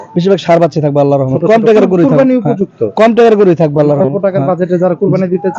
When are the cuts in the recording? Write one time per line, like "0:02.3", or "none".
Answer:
none